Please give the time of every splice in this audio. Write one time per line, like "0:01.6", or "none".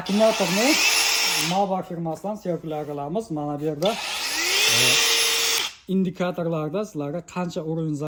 none